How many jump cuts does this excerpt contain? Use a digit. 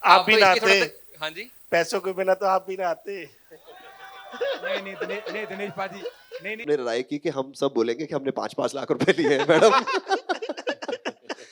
1